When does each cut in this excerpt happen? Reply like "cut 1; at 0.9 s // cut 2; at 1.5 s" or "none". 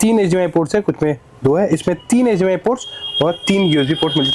none